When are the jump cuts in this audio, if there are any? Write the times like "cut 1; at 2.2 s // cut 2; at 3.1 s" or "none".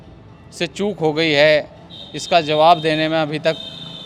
none